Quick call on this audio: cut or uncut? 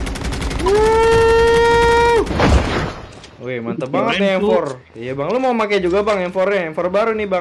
uncut